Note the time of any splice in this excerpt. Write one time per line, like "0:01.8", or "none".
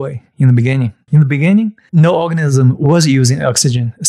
0:01.0
0:01.8